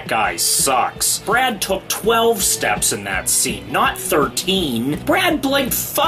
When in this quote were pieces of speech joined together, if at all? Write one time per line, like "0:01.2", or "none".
none